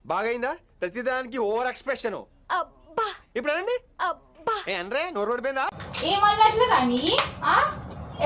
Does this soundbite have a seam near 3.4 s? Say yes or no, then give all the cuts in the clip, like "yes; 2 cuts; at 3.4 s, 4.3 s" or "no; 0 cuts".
no; 0 cuts